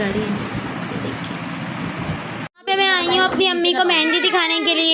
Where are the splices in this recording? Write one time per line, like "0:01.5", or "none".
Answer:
0:02.6